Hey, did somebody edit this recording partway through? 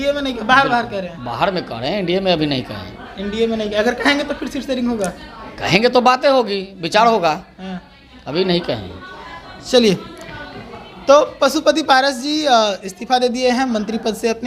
no; 0 cuts

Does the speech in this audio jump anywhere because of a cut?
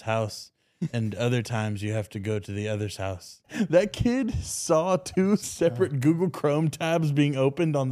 yes; 2 cuts; at 3.5 s, 5.5 s

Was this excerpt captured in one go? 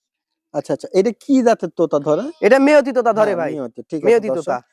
yes; 0 cuts

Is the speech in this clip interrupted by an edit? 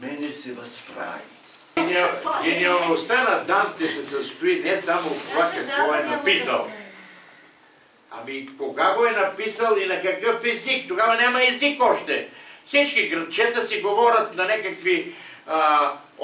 yes; 1 cut; at 1.8 s

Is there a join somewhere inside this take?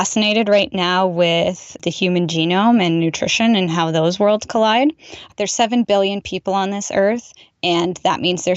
yes; 2 cuts; at 1.8 s, 5.2 s

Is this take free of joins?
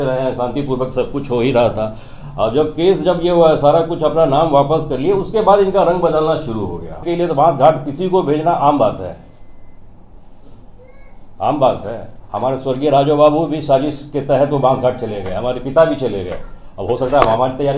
no; 1 cut; at 7.0 s

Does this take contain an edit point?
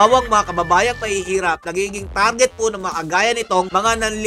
no; 0 cuts

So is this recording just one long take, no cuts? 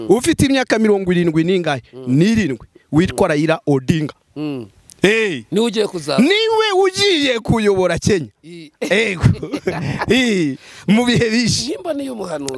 yes; 0 cuts

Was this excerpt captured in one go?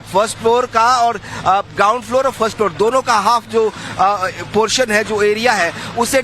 no; 1 cut; at 1.6 s

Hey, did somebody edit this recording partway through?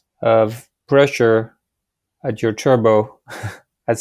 no; 0 cuts

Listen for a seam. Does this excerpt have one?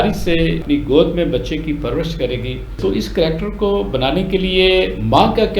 yes; 1 cut; at 2.8 s

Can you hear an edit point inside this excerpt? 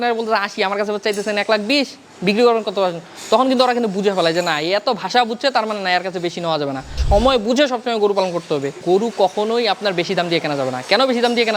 yes; 2 cuts; at 7.0 s, 8.8 s

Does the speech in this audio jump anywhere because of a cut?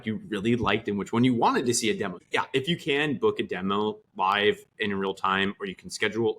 yes; 1 cut; at 2.2 s

